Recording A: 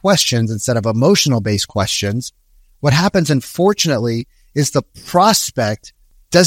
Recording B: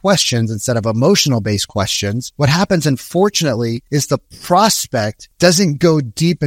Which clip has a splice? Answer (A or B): B